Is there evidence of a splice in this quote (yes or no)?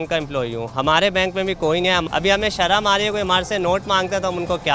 yes